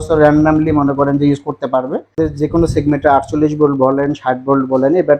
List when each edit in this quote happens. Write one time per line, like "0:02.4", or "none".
0:02.2